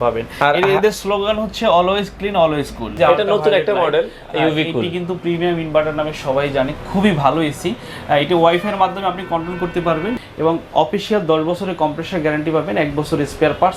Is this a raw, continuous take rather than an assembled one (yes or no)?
no